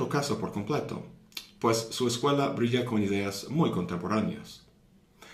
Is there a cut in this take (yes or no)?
yes